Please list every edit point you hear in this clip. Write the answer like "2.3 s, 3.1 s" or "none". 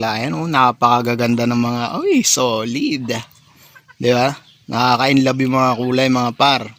none